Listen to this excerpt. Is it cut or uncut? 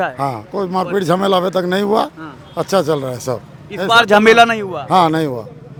uncut